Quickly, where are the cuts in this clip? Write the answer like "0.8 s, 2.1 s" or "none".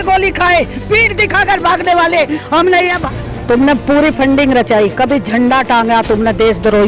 3.0 s